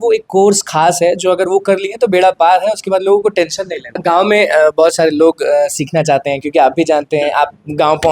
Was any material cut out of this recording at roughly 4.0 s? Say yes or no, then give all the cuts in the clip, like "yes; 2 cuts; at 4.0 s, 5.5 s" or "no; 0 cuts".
yes; 1 cut; at 4.0 s